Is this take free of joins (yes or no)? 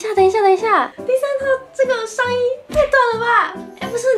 no